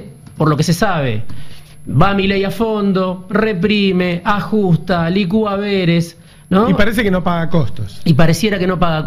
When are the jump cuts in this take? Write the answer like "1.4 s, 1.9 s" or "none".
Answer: none